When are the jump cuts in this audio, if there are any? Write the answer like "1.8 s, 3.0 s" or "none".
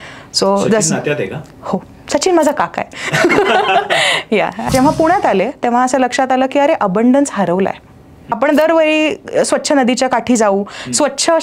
4.7 s, 8.2 s